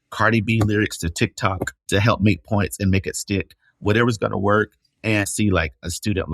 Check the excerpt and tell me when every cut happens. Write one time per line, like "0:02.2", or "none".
0:01.7
0:05.1